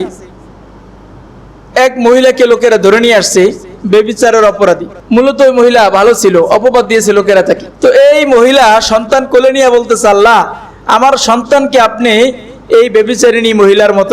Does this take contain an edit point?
yes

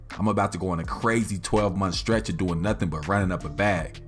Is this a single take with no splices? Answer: yes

